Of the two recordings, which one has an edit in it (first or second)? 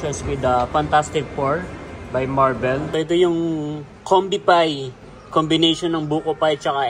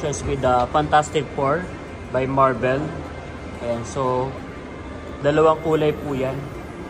first